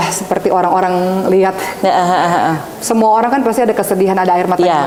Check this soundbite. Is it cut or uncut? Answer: uncut